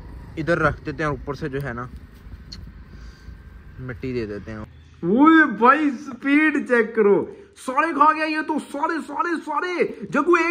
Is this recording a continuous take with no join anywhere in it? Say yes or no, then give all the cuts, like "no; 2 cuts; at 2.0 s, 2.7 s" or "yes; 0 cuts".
no; 1 cut; at 4.7 s